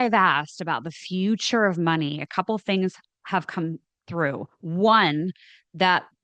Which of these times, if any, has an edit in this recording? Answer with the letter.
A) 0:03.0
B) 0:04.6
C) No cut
C